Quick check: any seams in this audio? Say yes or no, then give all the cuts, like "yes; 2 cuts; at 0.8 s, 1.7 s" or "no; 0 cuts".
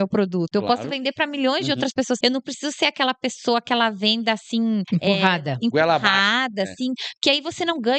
yes; 2 cuts; at 2.2 s, 4.9 s